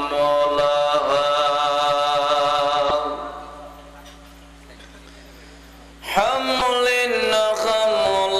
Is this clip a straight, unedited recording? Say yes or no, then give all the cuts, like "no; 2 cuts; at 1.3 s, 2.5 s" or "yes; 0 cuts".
no; 2 cuts; at 2.9 s, 6.6 s